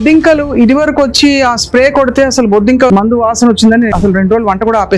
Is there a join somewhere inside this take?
yes; 2 cuts; at 2.9 s, 3.9 s

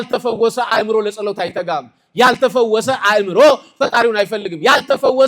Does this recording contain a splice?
no; 0 cuts

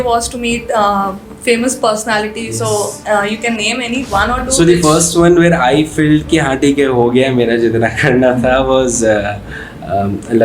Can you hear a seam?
no; 0 cuts

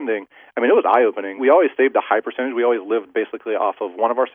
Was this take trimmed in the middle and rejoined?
yes; 1 cut; at 1.4 s

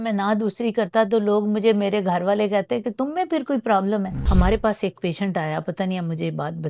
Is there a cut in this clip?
yes; 1 cut; at 4.2 s

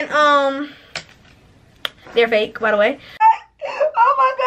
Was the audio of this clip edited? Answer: yes; 1 cut; at 3.2 s

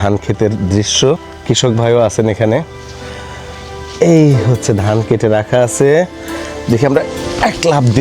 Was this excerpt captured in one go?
no; 1 cut; at 1.4 s

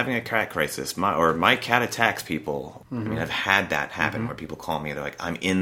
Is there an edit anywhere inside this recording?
yes; 1 cut; at 2.8 s

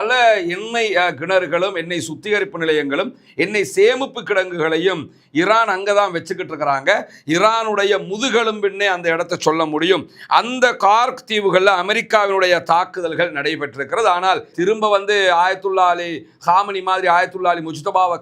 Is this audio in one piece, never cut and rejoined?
no; 1 cut; at 14.5 s

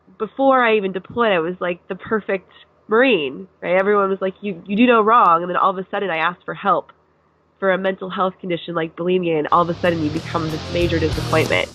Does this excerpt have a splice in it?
no; 0 cuts

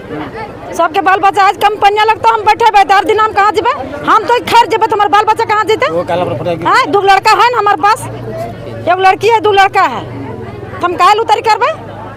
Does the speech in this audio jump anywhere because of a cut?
no; 0 cuts

